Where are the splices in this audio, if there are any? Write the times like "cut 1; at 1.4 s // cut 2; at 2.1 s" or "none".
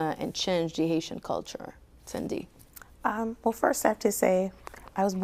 none